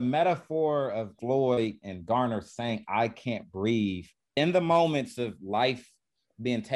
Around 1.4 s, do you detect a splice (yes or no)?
yes